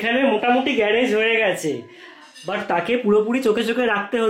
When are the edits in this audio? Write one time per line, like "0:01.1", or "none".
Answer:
none